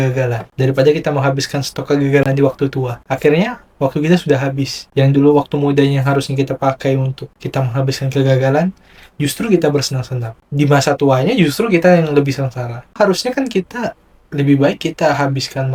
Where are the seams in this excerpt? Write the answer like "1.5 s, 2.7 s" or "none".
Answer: none